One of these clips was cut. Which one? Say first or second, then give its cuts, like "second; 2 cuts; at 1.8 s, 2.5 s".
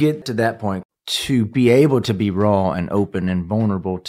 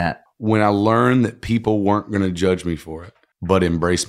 first; 1 cut; at 0.9 s